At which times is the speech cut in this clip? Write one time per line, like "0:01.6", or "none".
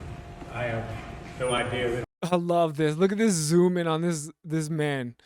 0:02.0